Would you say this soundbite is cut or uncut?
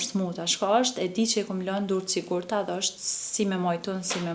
uncut